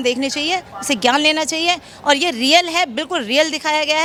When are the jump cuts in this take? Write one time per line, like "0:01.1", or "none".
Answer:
none